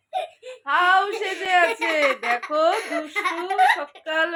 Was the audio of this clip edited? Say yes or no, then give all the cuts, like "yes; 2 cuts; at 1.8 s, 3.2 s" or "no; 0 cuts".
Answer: no; 0 cuts